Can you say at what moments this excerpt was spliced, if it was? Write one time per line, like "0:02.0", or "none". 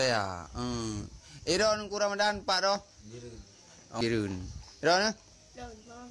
0:04.0

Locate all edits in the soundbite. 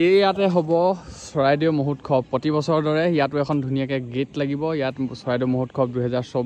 none

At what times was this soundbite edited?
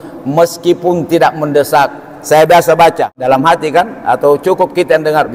0:03.2

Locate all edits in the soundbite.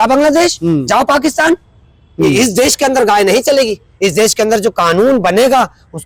none

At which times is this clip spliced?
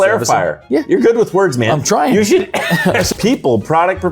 0:03.1

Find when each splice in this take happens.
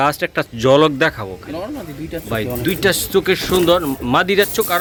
none

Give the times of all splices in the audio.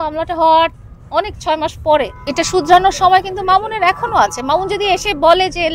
0:02.2

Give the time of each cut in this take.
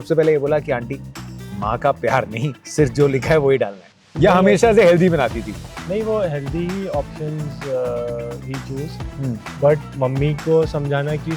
0:09.8

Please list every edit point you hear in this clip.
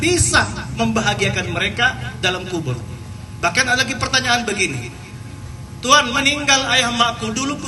none

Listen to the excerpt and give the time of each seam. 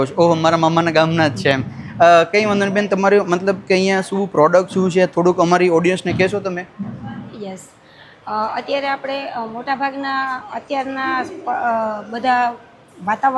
none

